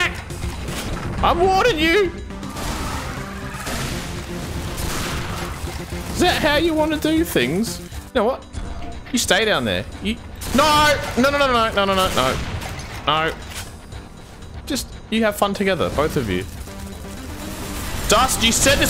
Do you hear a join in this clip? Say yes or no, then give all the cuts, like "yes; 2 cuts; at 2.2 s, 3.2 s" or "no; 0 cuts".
yes; 2 cuts; at 2.6 s, 17.6 s